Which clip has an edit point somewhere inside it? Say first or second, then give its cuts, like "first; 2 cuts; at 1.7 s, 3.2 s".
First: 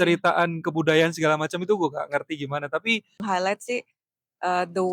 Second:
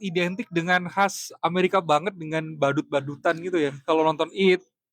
first; 1 cut; at 3.2 s